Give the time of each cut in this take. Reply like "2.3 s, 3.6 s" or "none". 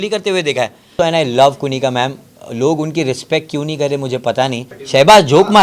0.9 s, 4.7 s